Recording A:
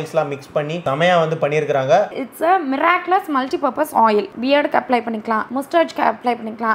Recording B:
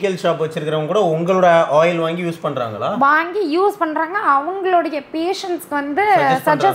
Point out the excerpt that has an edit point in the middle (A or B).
A